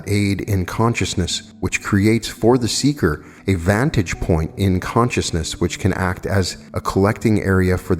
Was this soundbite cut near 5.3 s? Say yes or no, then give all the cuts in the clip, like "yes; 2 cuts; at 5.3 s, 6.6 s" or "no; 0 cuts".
no; 3 cuts; at 1.4 s, 3.3 s, 6.6 s